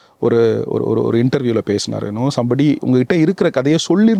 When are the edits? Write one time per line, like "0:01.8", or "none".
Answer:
none